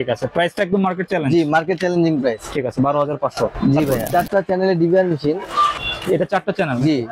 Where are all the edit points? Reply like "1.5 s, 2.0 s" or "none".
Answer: 4.1 s, 5.7 s